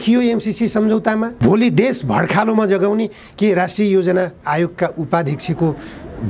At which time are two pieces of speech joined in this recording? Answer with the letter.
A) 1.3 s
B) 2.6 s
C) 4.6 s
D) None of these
A